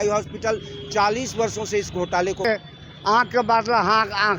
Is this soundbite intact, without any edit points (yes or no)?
no